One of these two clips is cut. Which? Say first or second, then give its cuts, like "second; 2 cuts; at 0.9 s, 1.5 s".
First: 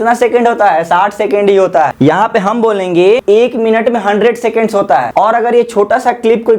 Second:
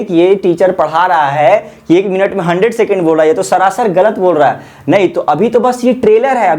first; 3 cuts; at 1.9 s, 3.2 s, 5.1 s